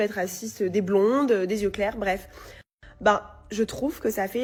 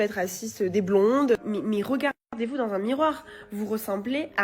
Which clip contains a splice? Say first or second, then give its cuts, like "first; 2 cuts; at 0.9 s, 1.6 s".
second; 1 cut; at 1.4 s